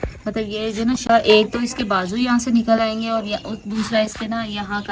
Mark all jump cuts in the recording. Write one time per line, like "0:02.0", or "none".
0:01.1